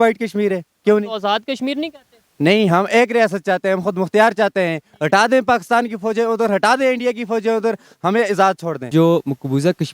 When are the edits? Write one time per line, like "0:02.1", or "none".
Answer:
0:08.9